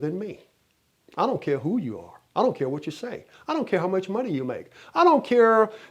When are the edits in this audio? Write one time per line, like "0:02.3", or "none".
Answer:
none